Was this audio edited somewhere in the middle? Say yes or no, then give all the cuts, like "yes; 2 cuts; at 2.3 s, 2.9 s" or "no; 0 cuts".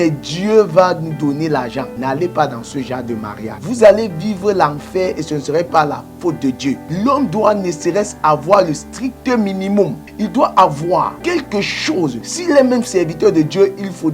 yes; 6 cuts; at 1.9 s, 3.5 s, 6.9 s, 10.0 s, 11.2 s, 12.3 s